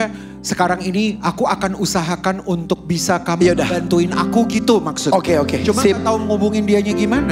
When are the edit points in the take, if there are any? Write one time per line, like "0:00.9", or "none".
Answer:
none